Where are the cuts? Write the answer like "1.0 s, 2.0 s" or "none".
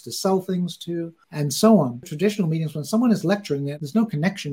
2.1 s, 3.7 s